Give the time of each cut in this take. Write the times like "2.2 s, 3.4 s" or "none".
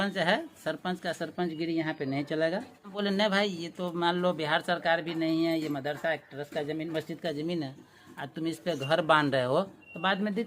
3.0 s